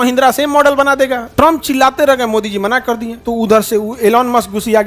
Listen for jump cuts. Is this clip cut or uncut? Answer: cut